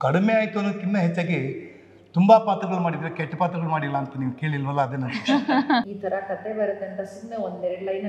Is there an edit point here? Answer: yes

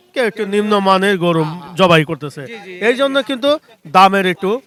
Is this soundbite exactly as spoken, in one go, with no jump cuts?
yes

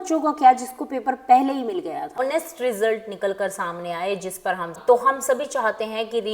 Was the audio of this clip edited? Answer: yes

